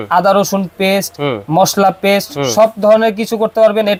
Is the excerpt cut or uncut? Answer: uncut